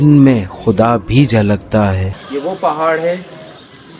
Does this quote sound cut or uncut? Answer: cut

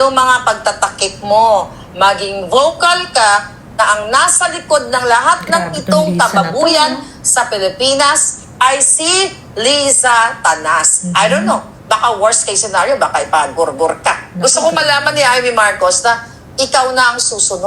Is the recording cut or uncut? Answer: cut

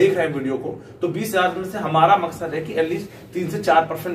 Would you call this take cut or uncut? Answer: uncut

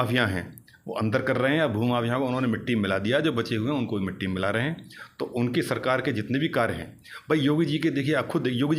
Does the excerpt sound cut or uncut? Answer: uncut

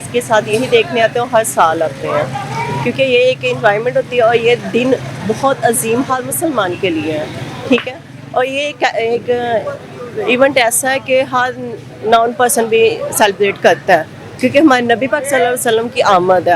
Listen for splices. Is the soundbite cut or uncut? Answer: uncut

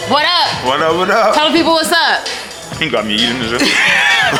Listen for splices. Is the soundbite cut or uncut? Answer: uncut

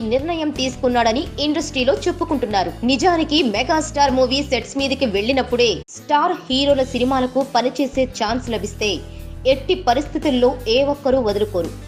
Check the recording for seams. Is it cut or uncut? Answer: uncut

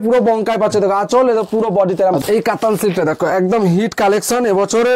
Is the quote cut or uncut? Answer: cut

